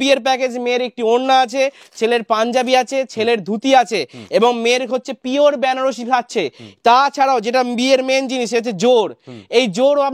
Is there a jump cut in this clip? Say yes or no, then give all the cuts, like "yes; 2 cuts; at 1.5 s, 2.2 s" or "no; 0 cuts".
no; 0 cuts